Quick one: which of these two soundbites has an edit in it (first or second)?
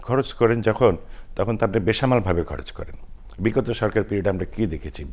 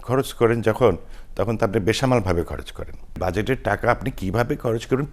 second